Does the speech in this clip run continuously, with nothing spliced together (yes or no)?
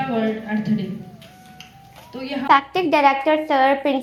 yes